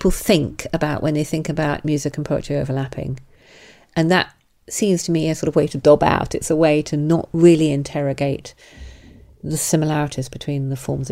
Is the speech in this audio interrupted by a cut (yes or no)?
no